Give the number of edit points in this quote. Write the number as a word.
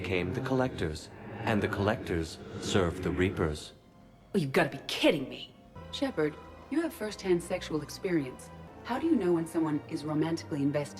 two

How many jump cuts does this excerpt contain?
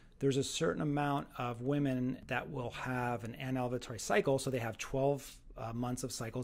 one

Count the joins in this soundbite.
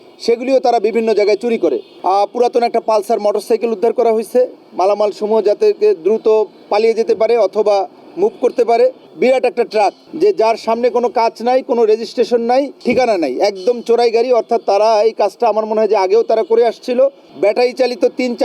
five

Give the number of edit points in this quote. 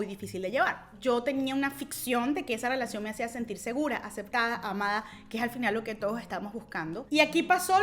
two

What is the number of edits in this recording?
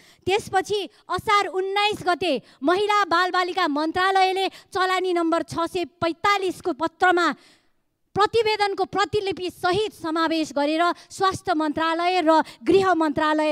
zero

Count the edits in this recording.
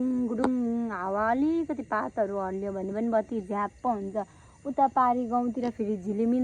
zero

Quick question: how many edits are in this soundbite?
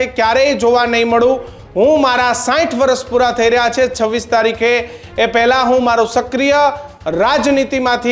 zero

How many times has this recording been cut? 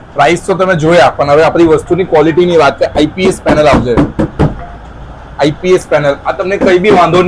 zero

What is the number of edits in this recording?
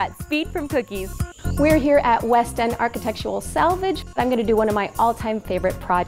two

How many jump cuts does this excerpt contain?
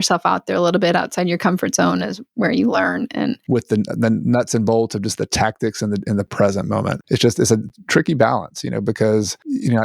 one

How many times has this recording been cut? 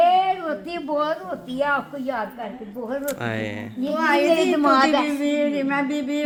zero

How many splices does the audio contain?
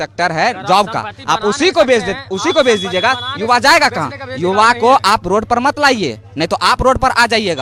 zero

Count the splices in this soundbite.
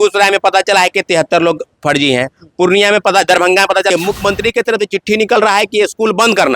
one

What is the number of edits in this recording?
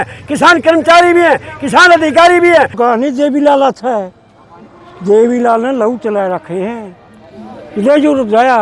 one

